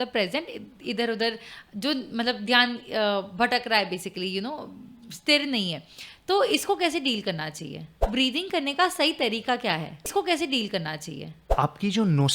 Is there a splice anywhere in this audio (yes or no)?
yes